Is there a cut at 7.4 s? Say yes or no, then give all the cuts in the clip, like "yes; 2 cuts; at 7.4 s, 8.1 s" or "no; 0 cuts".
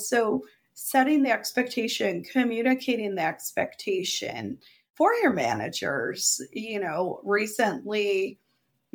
no; 0 cuts